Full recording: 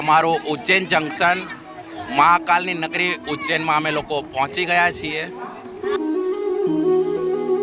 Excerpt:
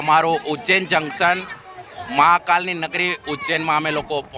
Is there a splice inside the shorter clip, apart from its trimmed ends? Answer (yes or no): no